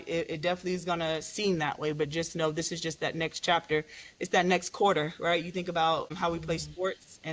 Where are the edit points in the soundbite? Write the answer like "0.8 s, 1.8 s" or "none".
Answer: 6.1 s